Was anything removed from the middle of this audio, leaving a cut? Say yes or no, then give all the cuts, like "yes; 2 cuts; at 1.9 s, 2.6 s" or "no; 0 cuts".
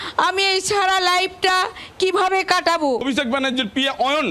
yes; 1 cut; at 3.0 s